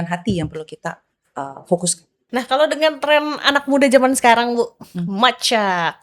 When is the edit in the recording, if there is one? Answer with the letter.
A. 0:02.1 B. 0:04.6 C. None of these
A